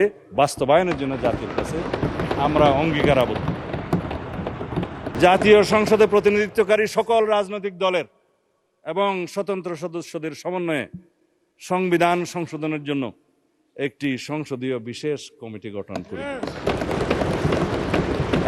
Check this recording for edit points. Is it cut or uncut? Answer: cut